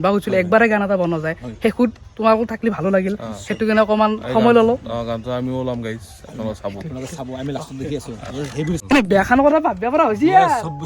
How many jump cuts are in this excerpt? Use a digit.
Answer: 1